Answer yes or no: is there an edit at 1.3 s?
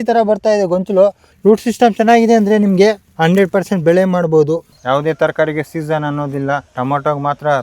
yes